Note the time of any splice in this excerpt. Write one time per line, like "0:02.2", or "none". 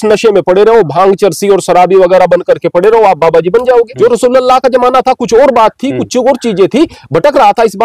0:03.9